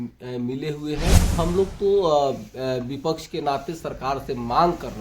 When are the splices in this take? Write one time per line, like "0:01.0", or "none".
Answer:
0:01.3